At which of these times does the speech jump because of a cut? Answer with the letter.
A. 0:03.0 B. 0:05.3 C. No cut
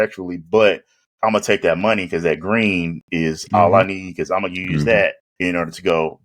B